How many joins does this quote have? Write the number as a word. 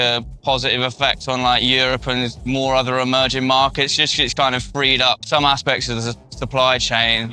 one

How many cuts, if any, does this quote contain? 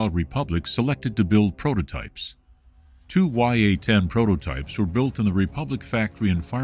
zero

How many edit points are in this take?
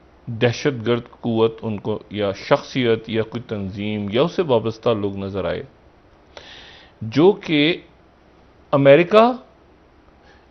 zero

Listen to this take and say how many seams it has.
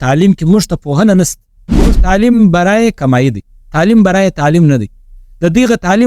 one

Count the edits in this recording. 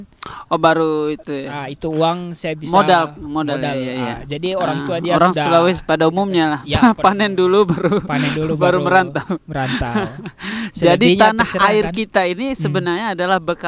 zero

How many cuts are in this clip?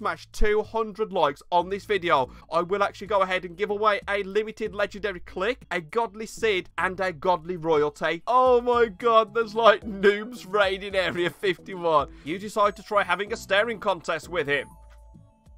five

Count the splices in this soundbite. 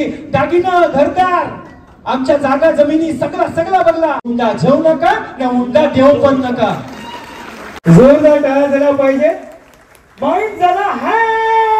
two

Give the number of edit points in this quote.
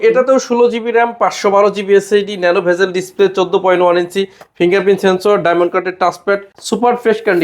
one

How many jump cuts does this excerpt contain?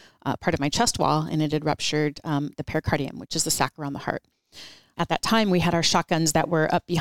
one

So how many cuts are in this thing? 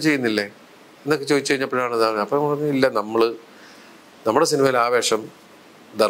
zero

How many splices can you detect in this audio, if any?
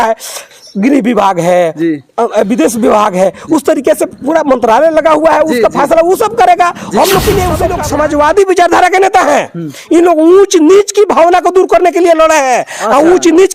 one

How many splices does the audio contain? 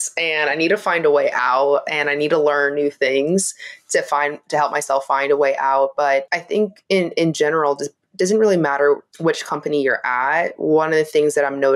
two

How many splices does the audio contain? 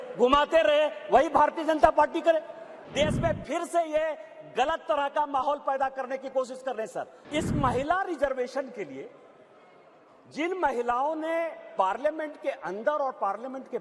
two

